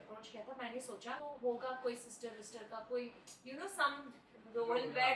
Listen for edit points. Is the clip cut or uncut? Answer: cut